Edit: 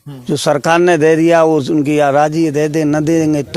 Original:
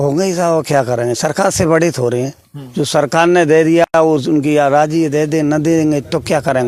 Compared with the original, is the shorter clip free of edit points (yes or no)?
no